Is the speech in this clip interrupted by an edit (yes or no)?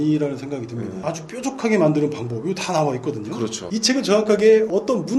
yes